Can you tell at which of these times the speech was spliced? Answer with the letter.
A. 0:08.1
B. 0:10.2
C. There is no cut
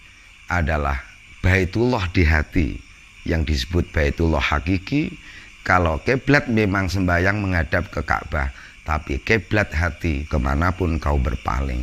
B